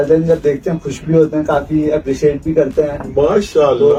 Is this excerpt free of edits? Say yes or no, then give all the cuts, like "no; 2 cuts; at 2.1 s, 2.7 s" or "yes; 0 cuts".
yes; 0 cuts